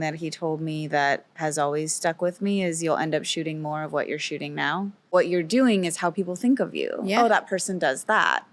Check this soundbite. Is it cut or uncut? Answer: cut